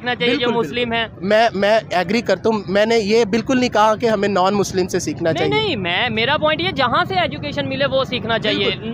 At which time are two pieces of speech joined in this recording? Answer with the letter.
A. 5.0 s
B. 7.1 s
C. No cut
C